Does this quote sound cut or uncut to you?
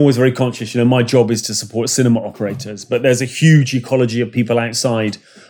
uncut